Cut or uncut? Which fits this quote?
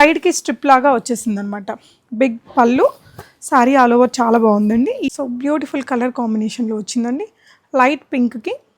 cut